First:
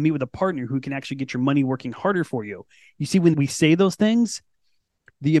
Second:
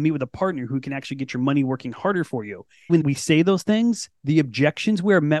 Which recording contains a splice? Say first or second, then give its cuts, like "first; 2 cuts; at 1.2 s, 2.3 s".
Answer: second; 2 cuts; at 2.9 s, 4.1 s